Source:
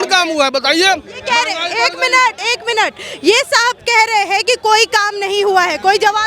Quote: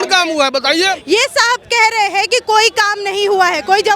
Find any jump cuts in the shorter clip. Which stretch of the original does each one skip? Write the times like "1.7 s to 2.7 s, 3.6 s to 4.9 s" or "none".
1.0 s to 3.1 s